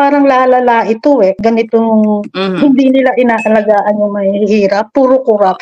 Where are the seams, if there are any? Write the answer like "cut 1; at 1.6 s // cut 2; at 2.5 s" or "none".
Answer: cut 1; at 1.4 s